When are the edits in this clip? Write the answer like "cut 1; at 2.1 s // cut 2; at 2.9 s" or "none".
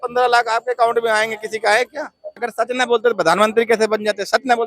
cut 1; at 2.4 s